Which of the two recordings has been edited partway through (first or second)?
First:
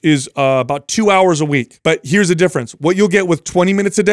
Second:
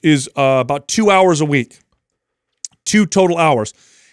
first